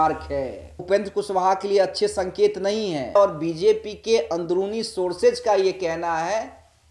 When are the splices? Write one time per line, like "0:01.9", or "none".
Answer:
0:00.8
0:03.2